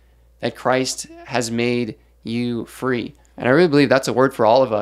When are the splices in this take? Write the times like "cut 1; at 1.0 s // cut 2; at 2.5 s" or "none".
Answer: cut 1; at 3.2 s